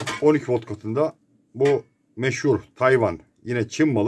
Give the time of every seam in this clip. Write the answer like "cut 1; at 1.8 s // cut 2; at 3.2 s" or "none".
none